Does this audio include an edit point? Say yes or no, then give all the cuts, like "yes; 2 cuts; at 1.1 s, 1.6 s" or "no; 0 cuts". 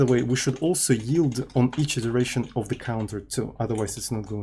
no; 0 cuts